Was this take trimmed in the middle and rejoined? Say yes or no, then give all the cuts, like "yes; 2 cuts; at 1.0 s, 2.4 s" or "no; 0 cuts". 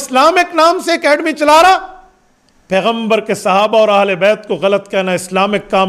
no; 0 cuts